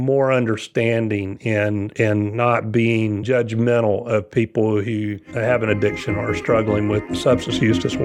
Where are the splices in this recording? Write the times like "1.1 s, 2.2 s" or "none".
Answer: 5.2 s, 7.1 s